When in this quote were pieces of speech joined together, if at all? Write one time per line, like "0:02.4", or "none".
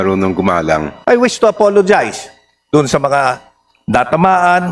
0:00.9